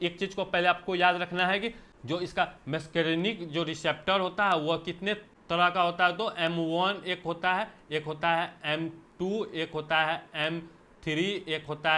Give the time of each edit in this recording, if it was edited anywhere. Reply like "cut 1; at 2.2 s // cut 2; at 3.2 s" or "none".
cut 1; at 1.9 s // cut 2; at 5.3 s